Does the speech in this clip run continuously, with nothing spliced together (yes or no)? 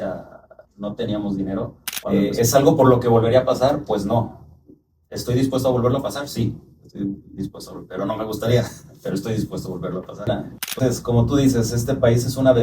no